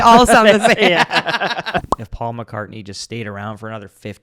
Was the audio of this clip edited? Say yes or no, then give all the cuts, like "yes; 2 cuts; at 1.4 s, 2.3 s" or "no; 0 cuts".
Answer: yes; 1 cut; at 1.9 s